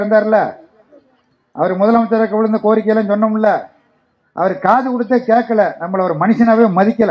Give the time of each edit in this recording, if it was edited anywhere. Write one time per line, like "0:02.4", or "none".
none